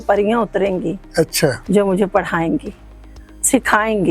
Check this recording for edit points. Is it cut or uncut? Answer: uncut